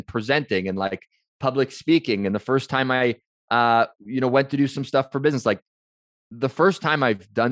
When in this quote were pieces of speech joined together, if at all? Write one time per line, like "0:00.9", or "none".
none